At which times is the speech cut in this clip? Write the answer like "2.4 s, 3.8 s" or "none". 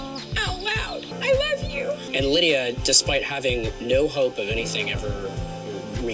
none